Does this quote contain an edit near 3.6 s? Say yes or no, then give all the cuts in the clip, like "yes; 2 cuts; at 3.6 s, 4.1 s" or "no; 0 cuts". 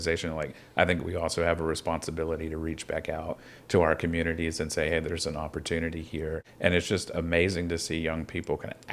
no; 1 cut; at 6.5 s